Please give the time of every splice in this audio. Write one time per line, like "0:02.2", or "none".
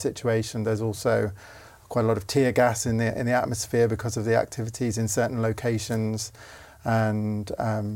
none